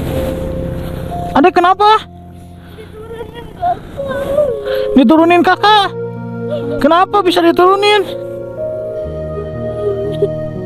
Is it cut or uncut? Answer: uncut